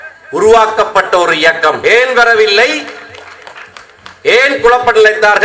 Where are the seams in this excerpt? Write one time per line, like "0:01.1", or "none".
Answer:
0:01.8